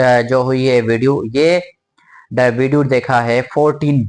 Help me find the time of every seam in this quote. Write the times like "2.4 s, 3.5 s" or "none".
none